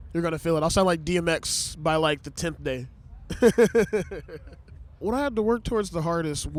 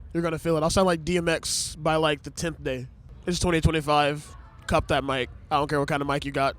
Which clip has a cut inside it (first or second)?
second